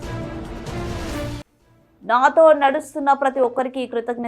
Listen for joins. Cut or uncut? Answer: cut